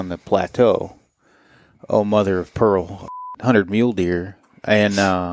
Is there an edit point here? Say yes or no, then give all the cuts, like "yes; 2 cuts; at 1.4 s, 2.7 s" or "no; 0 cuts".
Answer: yes; 1 cut; at 3.0 s